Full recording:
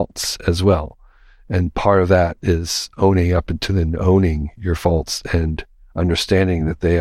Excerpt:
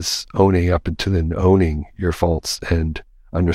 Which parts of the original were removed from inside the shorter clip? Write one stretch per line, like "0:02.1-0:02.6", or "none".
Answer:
none

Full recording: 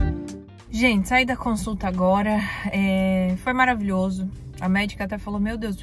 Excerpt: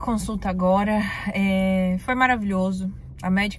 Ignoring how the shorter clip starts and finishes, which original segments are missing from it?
none

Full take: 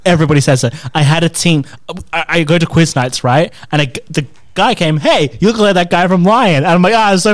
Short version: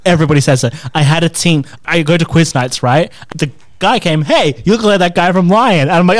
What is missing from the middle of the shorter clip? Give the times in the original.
0:01.8-0:02.2
0:03.6-0:04.0

